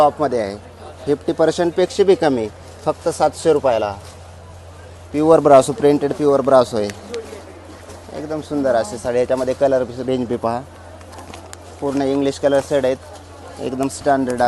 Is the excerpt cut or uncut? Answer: uncut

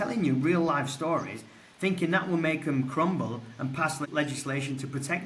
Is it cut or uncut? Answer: cut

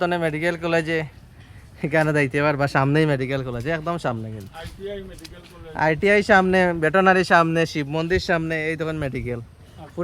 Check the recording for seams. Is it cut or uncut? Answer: uncut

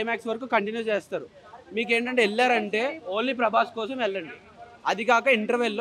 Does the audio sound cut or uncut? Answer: uncut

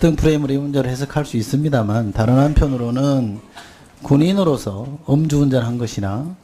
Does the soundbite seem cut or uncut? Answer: cut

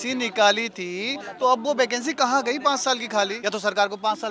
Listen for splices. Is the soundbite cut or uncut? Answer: cut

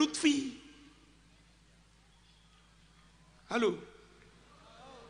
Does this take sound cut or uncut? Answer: uncut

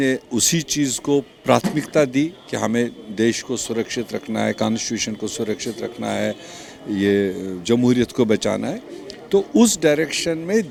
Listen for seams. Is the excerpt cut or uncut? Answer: uncut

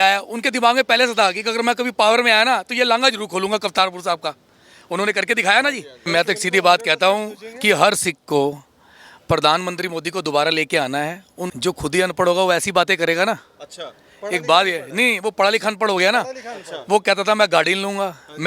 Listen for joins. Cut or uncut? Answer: cut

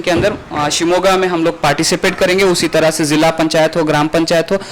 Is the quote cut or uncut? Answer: uncut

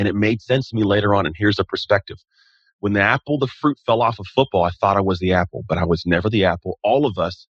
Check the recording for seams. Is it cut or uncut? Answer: uncut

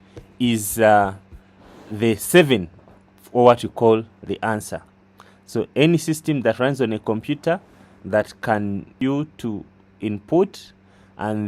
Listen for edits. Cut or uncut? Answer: cut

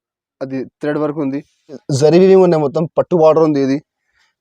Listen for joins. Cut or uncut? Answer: cut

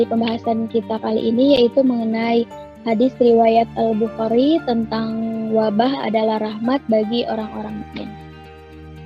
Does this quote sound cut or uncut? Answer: cut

